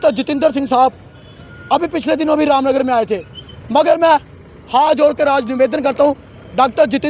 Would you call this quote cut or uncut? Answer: uncut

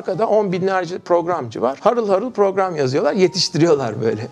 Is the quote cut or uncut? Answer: uncut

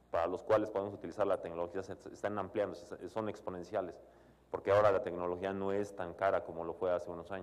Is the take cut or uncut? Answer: uncut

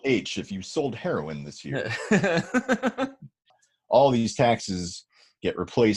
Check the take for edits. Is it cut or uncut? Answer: cut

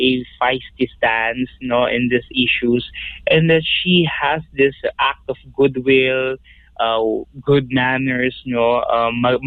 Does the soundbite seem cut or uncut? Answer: uncut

